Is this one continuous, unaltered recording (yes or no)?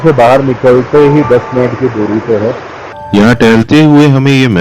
no